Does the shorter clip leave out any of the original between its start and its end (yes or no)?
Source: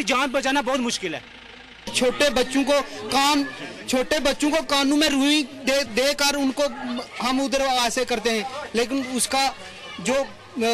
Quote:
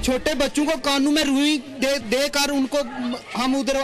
no